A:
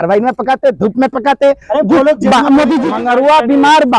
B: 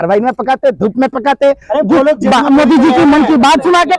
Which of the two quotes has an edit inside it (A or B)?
A